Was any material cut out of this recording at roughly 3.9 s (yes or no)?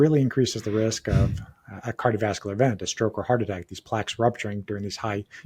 no